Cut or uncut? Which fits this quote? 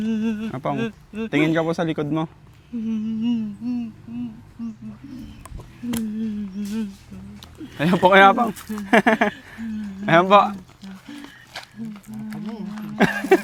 uncut